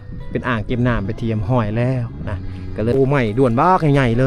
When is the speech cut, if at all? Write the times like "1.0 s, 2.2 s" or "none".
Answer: 2.9 s

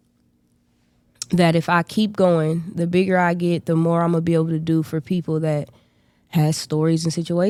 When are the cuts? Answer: none

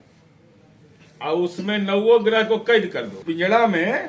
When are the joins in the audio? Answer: 3.2 s

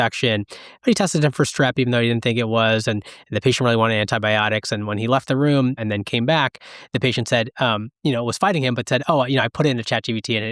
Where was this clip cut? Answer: 5.8 s

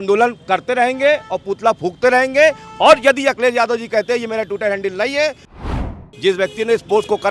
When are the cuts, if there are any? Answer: 5.7 s

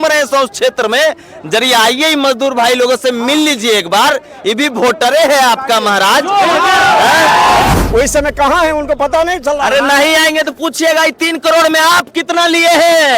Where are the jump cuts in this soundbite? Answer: 7.7 s

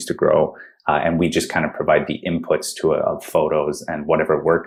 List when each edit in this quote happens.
none

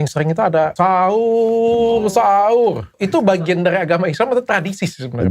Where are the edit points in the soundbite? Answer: 0.7 s, 3.0 s

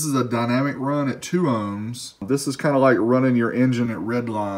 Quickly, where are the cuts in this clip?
2.2 s

